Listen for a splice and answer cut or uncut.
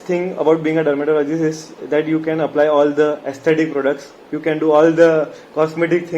uncut